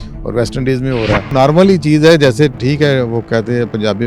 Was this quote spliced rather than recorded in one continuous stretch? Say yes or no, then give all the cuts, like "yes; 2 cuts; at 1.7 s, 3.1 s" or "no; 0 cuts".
yes; 1 cut; at 1.3 s